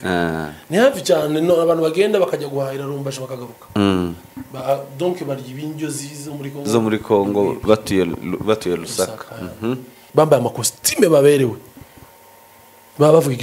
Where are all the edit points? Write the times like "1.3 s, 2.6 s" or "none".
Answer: 10.0 s